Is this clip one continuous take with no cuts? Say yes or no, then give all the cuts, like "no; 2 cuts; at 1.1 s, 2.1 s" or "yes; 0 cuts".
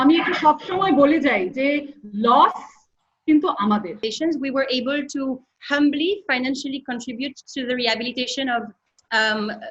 no; 1 cut; at 4.0 s